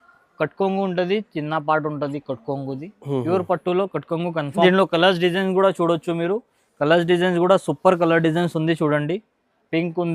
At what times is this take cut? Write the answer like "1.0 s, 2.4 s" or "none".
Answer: 4.6 s

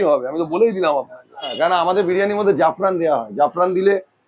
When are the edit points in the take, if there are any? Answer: 1.5 s

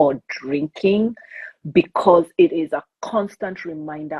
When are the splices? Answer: none

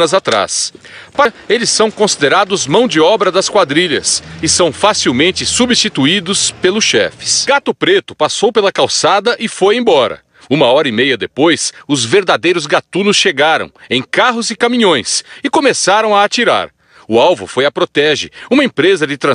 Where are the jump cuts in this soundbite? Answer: 17.0 s

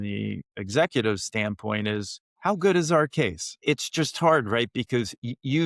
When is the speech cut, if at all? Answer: 2.2 s, 3.6 s

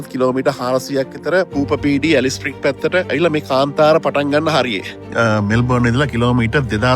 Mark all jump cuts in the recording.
1.5 s, 3.1 s, 5.0 s

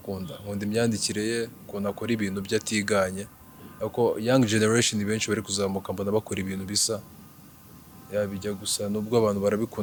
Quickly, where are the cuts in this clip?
none

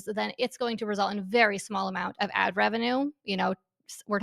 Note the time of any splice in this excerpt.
none

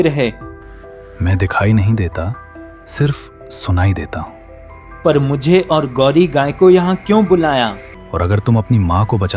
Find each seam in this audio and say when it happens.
7.9 s

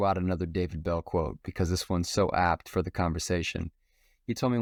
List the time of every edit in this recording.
none

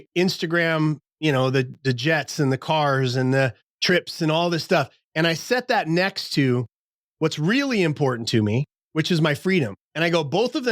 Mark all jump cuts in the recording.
1.1 s, 3.7 s, 8.8 s, 9.8 s

